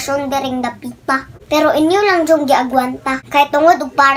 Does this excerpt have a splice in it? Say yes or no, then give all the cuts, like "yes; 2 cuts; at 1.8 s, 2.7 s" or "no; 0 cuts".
no; 0 cuts